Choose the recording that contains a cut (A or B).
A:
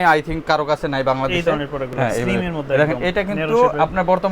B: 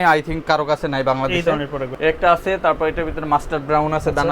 B